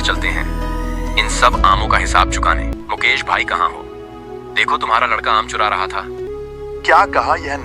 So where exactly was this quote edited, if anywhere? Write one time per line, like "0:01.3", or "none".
0:02.7
0:06.3